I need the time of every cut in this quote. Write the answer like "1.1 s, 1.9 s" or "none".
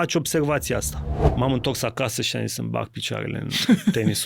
1.3 s